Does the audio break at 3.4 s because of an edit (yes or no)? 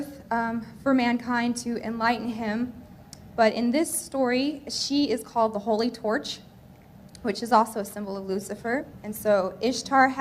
no